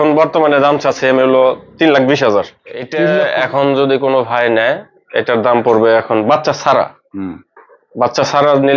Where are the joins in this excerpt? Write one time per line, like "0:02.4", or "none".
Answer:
0:02.9